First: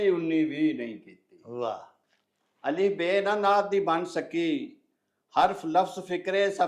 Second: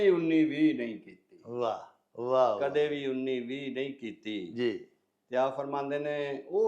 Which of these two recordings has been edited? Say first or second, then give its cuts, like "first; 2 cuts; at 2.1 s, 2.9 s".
first; 1 cut; at 2.0 s